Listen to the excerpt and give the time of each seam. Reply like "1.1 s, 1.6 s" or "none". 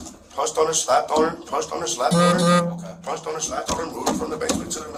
none